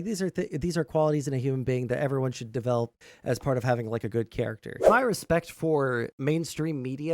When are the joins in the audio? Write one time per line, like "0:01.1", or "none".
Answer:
0:04.8
0:06.1